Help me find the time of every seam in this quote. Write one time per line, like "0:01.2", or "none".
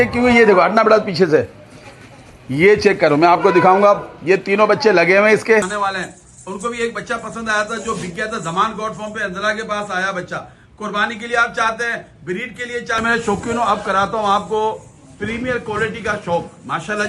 0:05.7
0:13.0

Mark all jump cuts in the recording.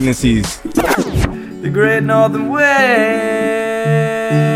0:00.9

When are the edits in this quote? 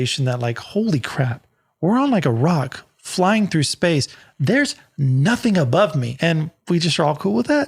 0:06.0

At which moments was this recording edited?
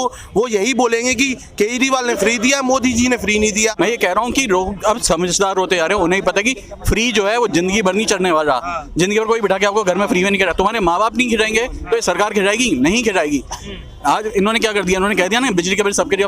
0:03.6

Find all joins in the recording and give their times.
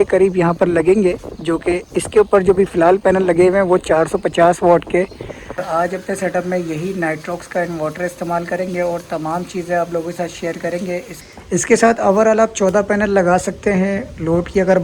0:05.6
0:11.1

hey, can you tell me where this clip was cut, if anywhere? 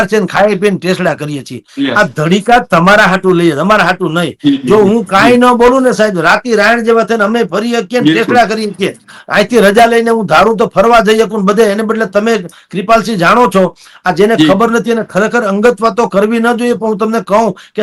none

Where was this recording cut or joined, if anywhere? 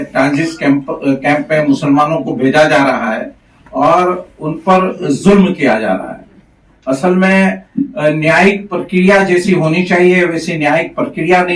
none

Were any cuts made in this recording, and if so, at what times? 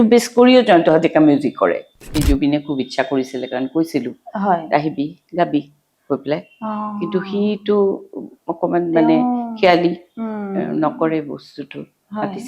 0:02.1

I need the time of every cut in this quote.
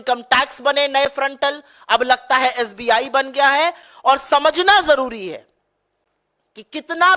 none

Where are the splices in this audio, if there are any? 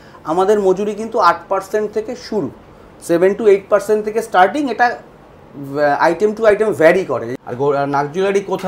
0:07.3

